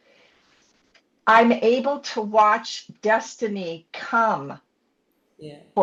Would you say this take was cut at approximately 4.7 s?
no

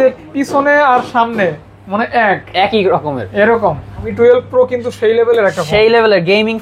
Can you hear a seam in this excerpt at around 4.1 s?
yes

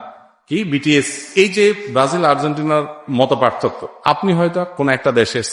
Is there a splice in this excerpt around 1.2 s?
yes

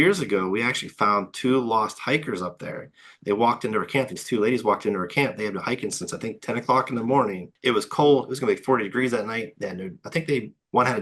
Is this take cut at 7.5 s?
yes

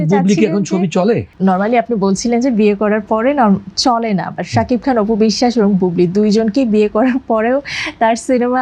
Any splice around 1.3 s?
yes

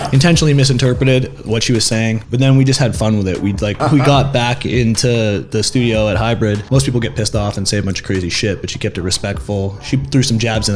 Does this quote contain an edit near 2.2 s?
yes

